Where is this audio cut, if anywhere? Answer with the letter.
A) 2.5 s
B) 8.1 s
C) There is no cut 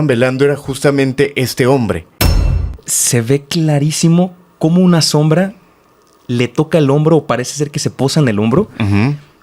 A